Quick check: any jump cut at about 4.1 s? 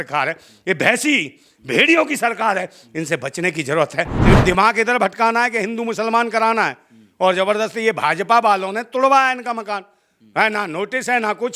yes; 1 cut; at 4.1 s

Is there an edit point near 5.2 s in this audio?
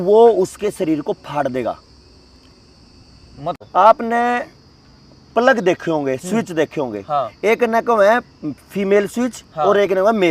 no; 1 cut; at 3.5 s

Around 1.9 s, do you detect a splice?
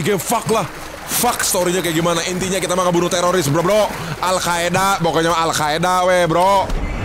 no; 0 cuts

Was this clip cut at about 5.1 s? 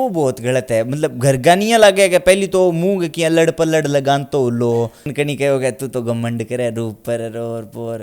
yes; 1 cut; at 5.1 s

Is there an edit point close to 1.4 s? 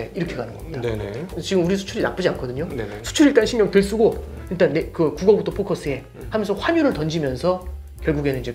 yes; 1 cut; at 1.4 s

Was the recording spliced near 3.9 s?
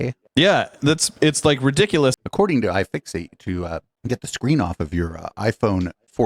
no; 1 cut; at 2.2 s

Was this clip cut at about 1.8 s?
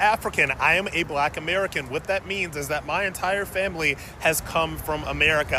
no; 0 cuts

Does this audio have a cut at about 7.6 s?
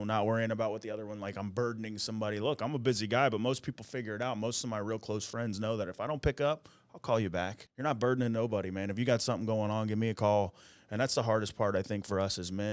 yes; 1 cut; at 7.6 s

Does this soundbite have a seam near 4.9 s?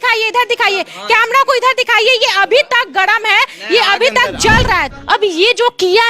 yes; 1 cut; at 4.9 s

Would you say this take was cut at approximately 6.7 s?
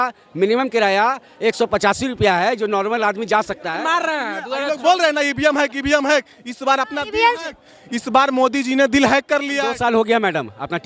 no; 2 cuts; at 3.7 s, 9.8 s

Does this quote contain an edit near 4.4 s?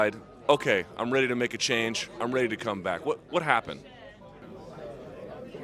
yes; 1 cut; at 4.4 s

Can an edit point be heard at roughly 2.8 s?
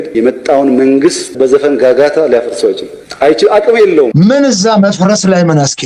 no; 2 cuts; at 1.3 s, 4.1 s

